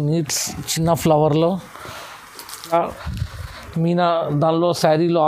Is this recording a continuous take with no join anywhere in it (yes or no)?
no